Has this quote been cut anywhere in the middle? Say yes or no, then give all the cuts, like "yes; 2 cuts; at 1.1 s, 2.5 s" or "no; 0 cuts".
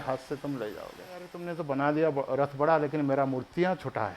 yes; 1 cut; at 1.4 s